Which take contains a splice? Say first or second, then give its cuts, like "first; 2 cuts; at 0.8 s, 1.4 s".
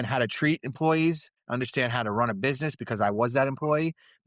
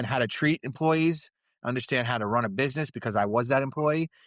first; 1 cut; at 1.3 s